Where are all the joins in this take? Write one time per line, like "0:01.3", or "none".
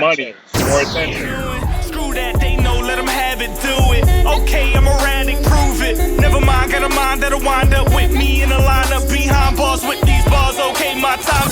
0:01.2